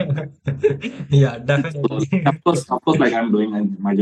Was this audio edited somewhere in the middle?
no; 0 cuts

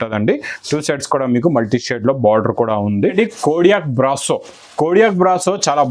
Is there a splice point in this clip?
yes; 1 cut; at 3.1 s

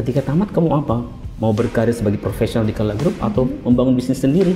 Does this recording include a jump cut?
no; 0 cuts

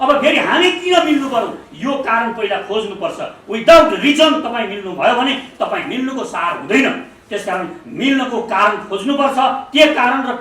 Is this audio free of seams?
yes; 0 cuts

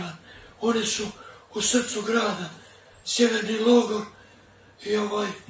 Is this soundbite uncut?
yes; 0 cuts

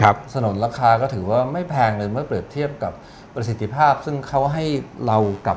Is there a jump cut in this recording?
no; 0 cuts

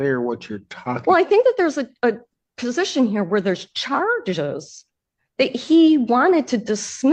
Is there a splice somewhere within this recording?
no; 0 cuts

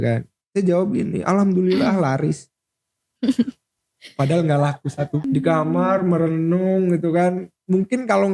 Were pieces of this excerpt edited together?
yes; 1 cut; at 5.2 s

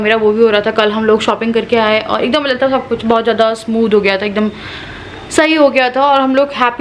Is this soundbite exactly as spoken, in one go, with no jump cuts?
yes; 0 cuts

